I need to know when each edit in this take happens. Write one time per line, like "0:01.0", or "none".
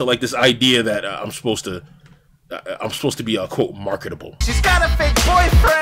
0:04.3